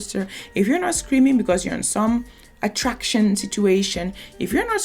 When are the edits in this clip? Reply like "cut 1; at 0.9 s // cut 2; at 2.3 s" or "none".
none